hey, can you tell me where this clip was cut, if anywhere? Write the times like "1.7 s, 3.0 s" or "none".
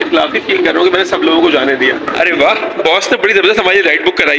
2.1 s